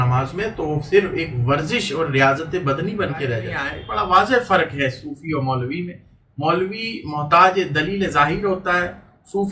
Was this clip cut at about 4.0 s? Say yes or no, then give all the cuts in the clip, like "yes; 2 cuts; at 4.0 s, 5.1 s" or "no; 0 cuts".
yes; 1 cut; at 4.0 s